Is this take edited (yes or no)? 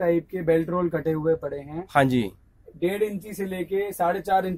no